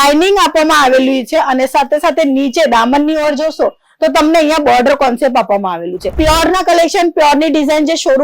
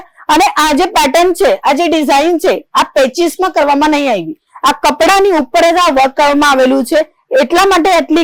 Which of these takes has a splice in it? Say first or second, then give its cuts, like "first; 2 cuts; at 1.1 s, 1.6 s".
first; 1 cut; at 6.1 s